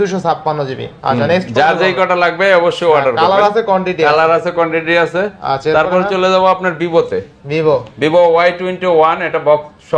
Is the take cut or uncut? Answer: uncut